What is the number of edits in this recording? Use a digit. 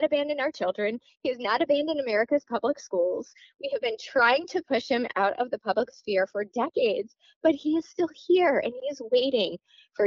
0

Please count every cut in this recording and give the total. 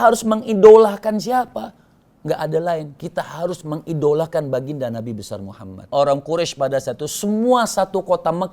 1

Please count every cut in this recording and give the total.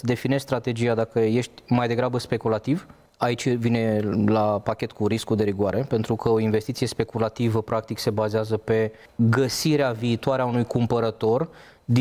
2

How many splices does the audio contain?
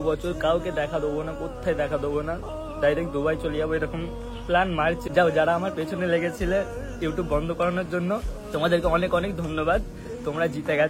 1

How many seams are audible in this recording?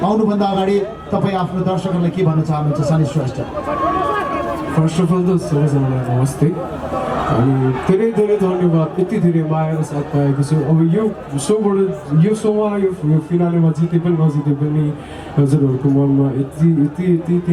0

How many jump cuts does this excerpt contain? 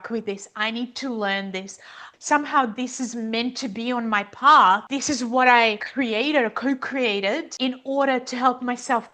2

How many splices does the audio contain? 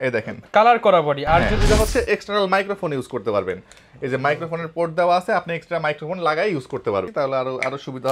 2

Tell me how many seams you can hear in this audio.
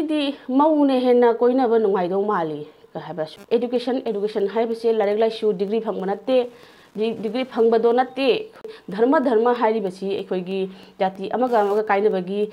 2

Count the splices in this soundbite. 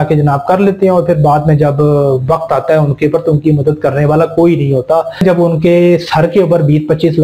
1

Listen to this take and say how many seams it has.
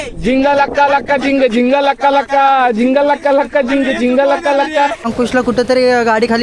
1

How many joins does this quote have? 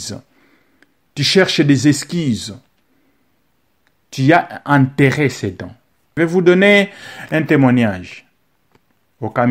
1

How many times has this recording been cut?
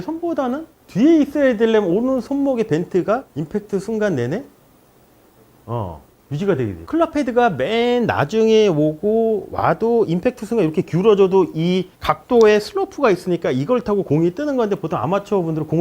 1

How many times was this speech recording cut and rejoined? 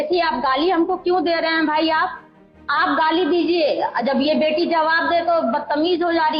0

